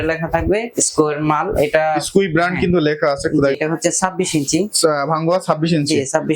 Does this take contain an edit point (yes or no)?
yes